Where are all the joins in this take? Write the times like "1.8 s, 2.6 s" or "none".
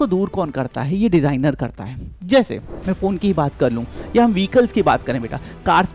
none